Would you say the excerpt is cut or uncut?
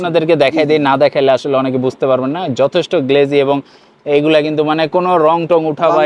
uncut